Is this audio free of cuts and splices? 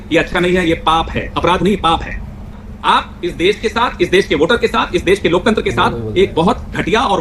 no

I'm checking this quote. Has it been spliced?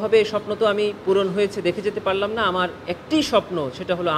no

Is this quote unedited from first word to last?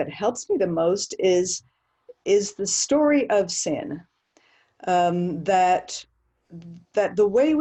yes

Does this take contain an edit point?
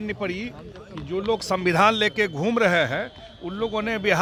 no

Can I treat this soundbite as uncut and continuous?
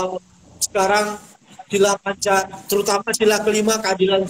yes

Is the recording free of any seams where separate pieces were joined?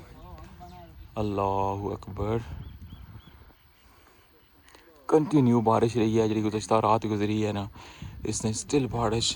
yes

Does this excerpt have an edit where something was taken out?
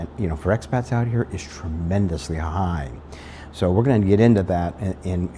no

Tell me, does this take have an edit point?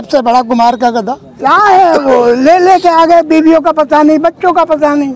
yes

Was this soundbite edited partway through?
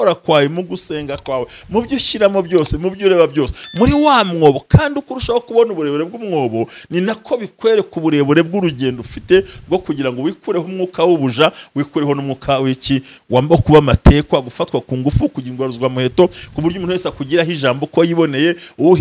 no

